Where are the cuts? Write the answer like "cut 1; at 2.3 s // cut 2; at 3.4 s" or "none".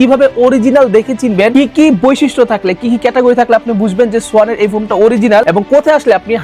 none